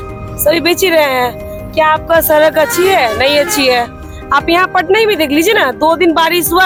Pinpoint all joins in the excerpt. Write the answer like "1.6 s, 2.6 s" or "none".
none